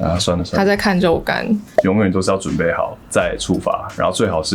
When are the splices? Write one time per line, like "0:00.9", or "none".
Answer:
0:01.7

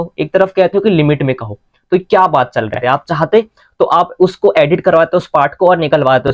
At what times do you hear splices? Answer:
0:02.8

